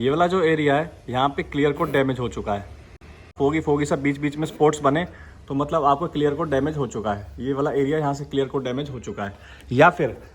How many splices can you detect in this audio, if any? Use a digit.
1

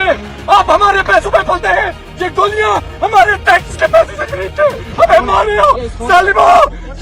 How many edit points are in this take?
0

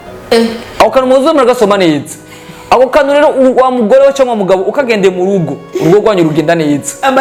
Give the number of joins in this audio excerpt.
0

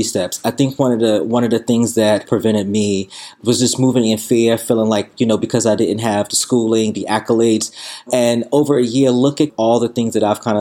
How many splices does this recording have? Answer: 3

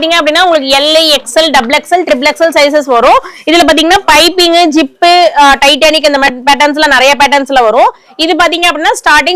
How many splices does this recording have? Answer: 0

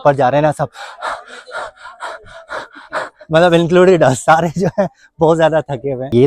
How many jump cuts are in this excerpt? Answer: 0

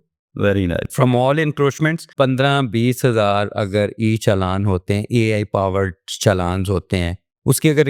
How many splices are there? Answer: 1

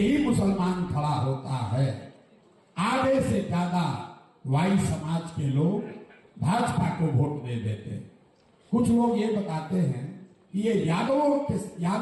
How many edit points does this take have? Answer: 0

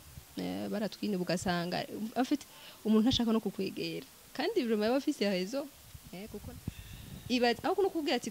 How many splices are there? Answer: 1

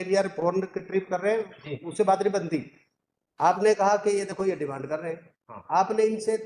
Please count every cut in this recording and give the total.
0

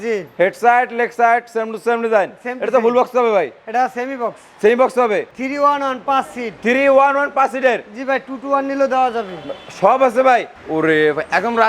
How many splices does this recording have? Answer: 2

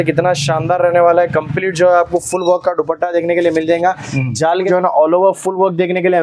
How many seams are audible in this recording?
1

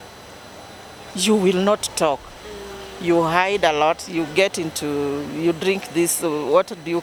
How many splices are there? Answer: 0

